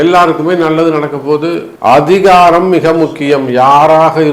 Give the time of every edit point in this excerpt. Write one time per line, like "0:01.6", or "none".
0:01.7